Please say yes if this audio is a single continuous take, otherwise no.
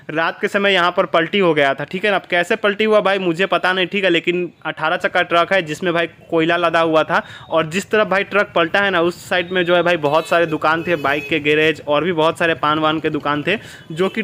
yes